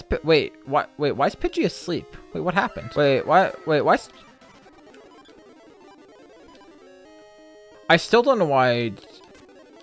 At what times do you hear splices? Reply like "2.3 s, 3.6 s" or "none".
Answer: 2.8 s, 7.8 s